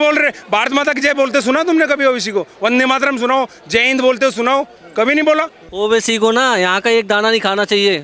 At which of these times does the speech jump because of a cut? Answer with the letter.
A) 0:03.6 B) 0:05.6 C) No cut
B